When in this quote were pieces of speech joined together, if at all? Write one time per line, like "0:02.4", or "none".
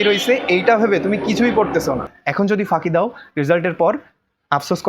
0:02.2